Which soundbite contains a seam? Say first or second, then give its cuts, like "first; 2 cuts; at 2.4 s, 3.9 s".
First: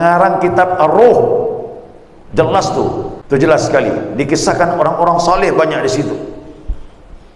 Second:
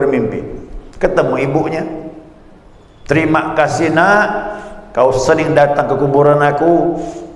first; 1 cut; at 3.2 s